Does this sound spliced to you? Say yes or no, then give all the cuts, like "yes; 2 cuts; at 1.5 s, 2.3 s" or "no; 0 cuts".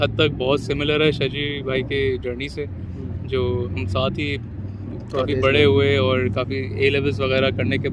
no; 0 cuts